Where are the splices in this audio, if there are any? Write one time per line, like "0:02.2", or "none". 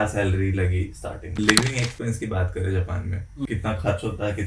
0:01.4
0:03.5